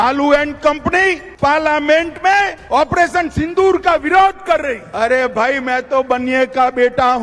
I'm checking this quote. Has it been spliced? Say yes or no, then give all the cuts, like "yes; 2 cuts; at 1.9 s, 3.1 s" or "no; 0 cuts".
yes; 3 cuts; at 1.3 s, 2.6 s, 4.9 s